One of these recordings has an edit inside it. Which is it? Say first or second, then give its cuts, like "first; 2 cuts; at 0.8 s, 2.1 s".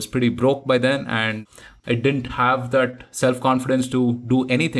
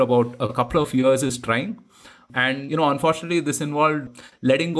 second; 1 cut; at 2.6 s